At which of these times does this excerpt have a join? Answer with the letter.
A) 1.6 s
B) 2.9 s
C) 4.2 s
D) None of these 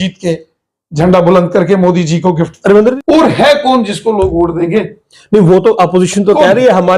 B